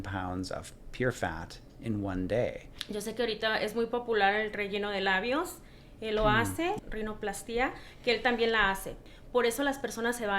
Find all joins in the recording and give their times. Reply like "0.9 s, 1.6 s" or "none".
2.7 s, 6.8 s, 9.0 s